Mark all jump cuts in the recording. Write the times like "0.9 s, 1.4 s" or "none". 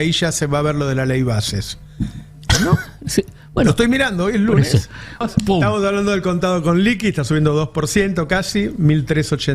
5.2 s